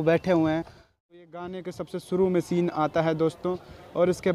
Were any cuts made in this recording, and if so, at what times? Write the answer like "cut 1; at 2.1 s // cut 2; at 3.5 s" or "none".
cut 1; at 1.2 s